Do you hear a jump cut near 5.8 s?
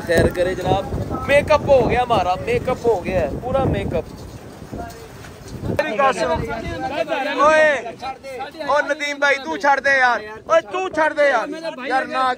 yes; 1 cut; at 5.8 s

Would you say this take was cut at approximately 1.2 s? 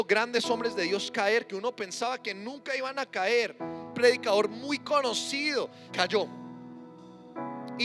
no; 2 cuts; at 3.9 s, 5.8 s

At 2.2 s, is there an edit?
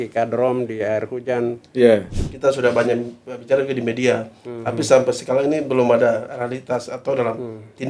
yes; 1 cut; at 2.2 s

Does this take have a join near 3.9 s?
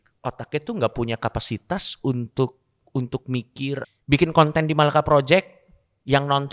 yes; 1 cut; at 3.9 s

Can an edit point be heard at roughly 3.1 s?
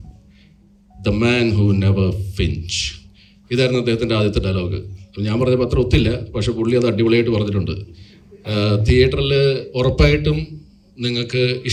no; 0 cuts

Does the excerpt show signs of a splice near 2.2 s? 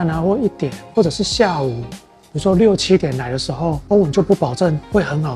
no; 0 cuts

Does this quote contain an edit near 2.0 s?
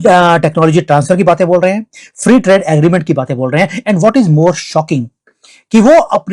no; 0 cuts

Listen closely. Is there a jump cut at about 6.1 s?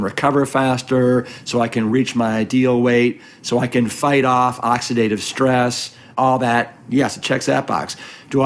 yes; 1 cut; at 6.1 s

